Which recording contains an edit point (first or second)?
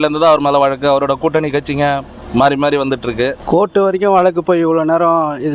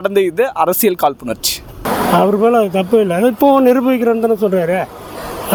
first